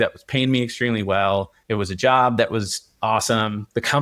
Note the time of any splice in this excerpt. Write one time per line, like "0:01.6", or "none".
0:01.6

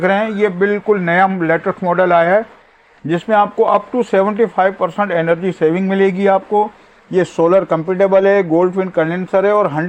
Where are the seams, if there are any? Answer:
none

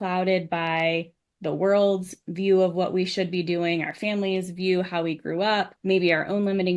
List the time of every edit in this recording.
0:05.7

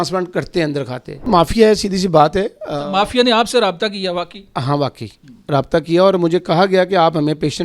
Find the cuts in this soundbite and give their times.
0:01.2

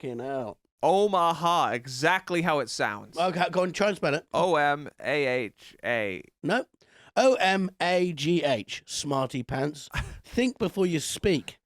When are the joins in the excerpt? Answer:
0:04.2

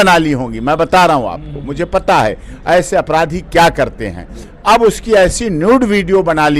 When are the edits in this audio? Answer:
none

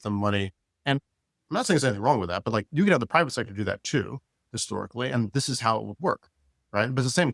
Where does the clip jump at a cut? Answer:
none

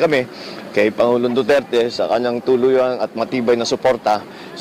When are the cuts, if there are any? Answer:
0:01.9

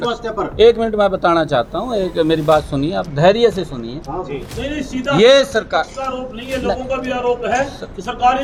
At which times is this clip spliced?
none

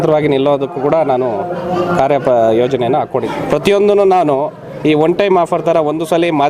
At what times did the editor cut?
0:03.3

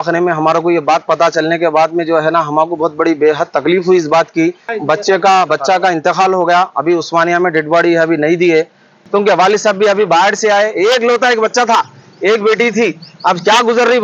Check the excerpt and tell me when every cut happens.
0:04.7
0:09.0

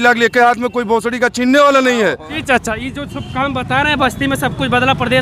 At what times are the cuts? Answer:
0:02.3

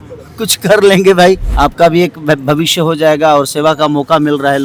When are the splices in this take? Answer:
0:01.5

